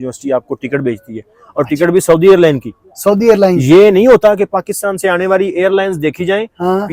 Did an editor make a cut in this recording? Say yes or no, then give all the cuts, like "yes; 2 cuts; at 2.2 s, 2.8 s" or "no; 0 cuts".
no; 0 cuts